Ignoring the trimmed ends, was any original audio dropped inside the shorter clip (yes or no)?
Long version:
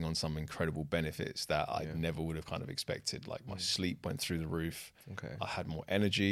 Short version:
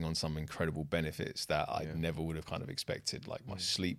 no